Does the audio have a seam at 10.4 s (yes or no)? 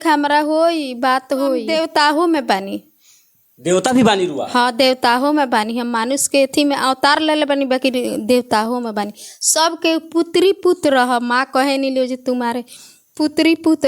no